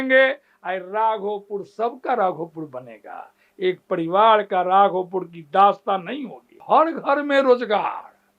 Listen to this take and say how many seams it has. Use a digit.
1